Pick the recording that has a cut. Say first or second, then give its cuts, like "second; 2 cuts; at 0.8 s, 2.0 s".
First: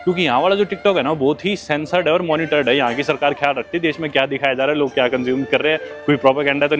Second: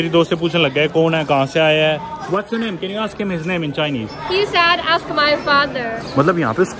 second; 3 cuts; at 2.1 s, 4.1 s, 5.9 s